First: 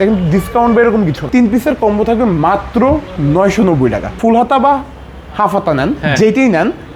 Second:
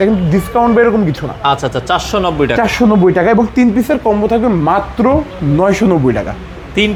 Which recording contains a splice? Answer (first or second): first